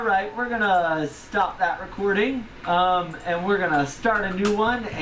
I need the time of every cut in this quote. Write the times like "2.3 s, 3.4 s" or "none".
2.5 s

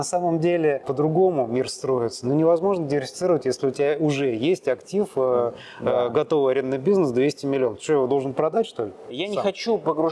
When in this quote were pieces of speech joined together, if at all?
0.9 s, 9.2 s

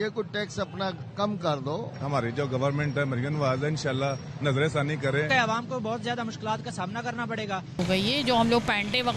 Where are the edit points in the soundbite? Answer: 5.3 s

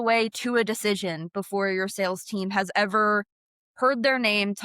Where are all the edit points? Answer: none

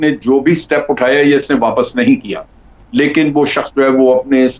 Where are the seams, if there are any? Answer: 2.8 s

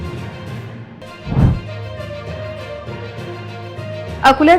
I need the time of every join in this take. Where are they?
1.1 s

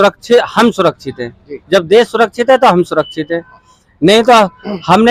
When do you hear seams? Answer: none

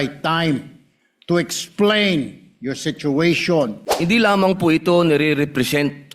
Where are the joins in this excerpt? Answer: 3.8 s

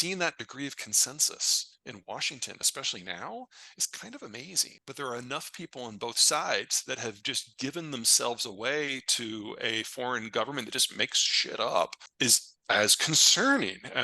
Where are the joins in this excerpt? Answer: 4.7 s, 12.0 s

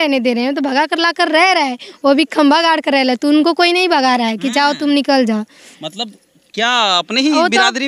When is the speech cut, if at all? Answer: none

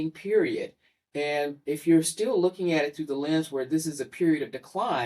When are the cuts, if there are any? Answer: none

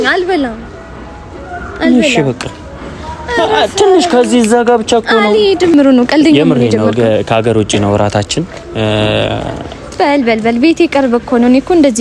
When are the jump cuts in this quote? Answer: 5.7 s

